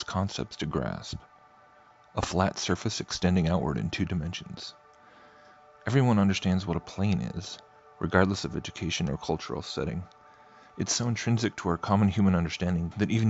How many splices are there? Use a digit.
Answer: 0